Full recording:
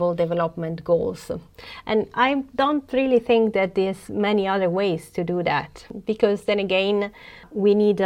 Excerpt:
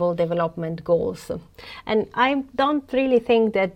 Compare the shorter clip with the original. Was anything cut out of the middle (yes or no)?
no